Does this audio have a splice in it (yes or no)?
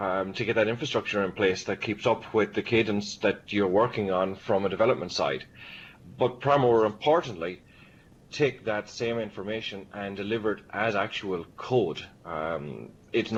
no